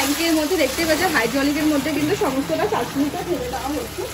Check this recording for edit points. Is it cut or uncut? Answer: uncut